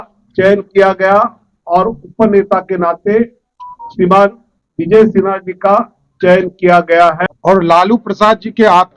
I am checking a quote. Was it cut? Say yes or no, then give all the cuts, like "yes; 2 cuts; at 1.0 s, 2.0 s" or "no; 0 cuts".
yes; 1 cut; at 7.3 s